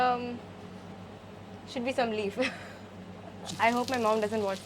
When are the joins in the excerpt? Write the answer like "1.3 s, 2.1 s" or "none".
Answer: 3.4 s